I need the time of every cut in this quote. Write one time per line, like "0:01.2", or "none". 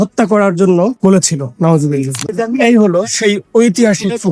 0:01.0
0:02.3